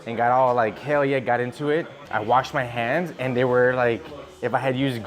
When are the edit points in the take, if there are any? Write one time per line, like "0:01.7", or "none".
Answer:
0:02.0